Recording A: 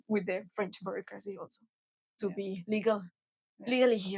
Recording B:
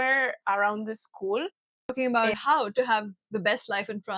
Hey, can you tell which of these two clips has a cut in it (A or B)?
B